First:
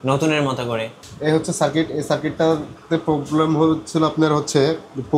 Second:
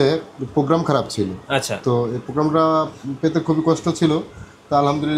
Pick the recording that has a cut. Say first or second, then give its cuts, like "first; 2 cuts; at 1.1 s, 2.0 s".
first; 1 cut; at 1.0 s